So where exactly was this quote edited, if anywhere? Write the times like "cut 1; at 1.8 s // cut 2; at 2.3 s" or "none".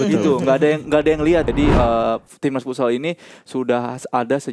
cut 1; at 1.5 s